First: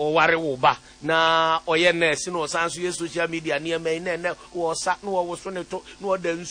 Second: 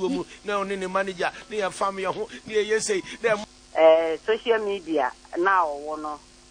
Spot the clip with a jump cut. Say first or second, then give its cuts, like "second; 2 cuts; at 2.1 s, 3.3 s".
second; 1 cut; at 3.4 s